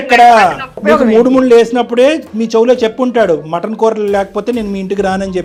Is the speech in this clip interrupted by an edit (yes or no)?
no